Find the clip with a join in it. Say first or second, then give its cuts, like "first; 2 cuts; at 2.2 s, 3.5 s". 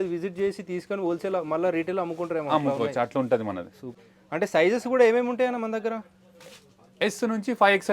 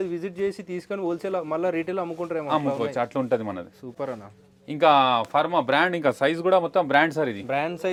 first; 1 cut; at 4.0 s